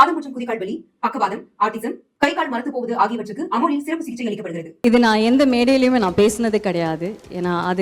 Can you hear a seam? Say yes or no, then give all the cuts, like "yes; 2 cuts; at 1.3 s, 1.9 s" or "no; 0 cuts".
yes; 1 cut; at 4.7 s